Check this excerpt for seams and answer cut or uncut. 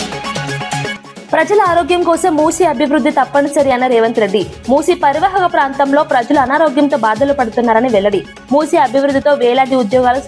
cut